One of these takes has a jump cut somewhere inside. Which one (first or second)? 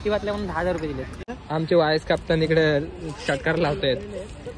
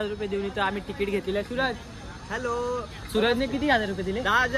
first